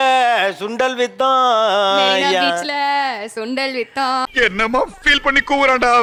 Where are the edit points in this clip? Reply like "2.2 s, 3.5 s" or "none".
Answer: none